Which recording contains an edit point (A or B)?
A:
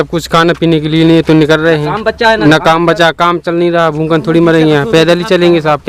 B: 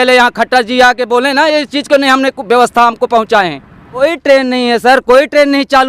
B